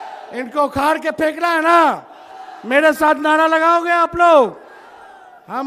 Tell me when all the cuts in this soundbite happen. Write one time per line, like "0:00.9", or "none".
none